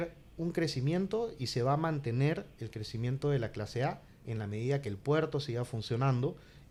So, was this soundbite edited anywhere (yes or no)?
no